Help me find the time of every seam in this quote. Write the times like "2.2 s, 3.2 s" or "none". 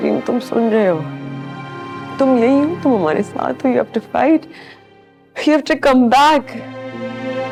none